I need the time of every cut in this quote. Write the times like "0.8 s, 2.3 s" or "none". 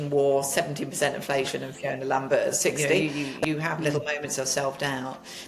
3.0 s